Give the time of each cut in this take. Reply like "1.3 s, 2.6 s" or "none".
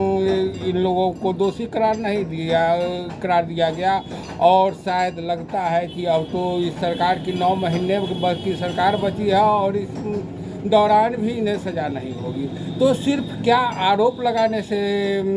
none